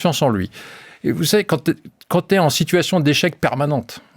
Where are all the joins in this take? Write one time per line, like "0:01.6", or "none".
none